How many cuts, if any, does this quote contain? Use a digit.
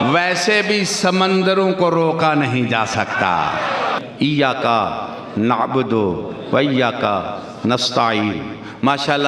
1